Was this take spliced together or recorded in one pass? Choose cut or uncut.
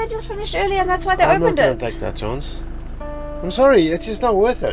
uncut